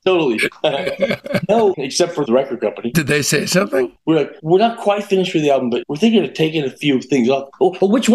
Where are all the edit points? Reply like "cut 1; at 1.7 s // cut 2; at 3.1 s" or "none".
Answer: cut 1; at 2.2 s // cut 2; at 4.0 s // cut 3; at 5.8 s